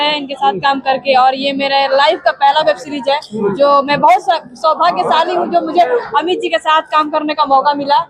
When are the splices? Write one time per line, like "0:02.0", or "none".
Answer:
none